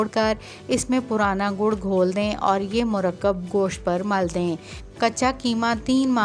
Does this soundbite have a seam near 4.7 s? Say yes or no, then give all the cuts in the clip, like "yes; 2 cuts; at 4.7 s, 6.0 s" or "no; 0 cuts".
yes; 1 cut; at 4.7 s